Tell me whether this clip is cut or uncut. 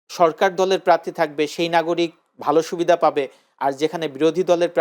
uncut